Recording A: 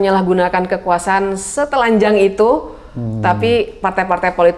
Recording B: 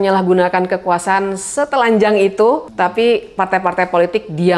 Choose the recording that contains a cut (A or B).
B